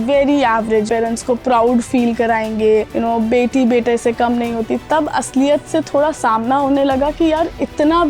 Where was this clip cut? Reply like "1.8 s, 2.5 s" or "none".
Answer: 0.9 s, 2.9 s